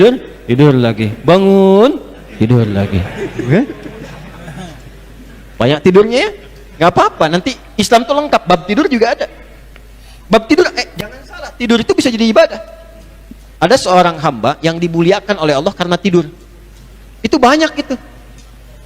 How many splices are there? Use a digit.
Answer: 1